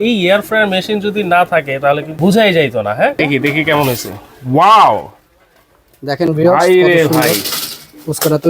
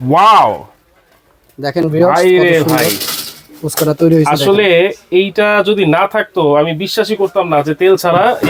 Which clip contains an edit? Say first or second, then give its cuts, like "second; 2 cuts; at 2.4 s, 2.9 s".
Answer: first; 2 cuts; at 2.1 s, 3.1 s